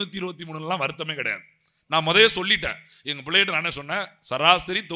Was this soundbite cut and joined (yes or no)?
no